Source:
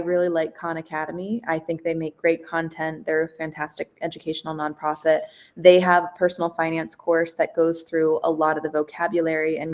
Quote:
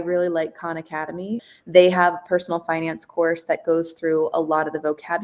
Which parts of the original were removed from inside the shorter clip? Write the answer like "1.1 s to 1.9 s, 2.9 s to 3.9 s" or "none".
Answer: 1.4 s to 5.3 s